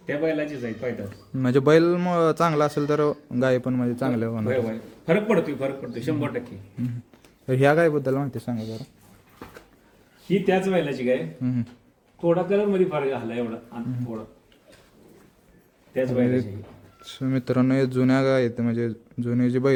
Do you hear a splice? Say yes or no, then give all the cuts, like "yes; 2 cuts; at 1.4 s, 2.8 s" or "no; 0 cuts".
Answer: no; 0 cuts